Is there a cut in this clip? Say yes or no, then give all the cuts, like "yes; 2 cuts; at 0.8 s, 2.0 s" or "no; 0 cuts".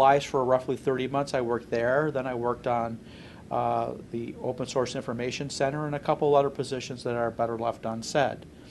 yes; 1 cut; at 7.3 s